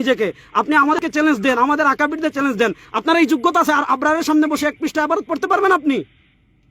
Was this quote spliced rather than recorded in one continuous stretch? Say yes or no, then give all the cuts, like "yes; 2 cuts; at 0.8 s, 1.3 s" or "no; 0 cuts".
yes; 1 cut; at 1.0 s